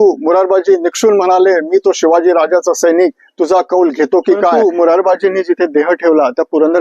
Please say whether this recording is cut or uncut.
cut